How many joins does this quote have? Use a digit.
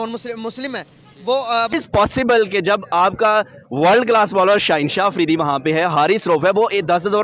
1